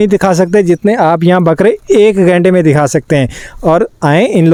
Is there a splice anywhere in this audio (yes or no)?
no